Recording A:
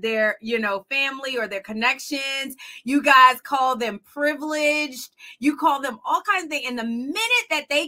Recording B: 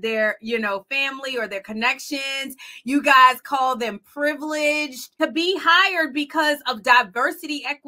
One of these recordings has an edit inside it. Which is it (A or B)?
B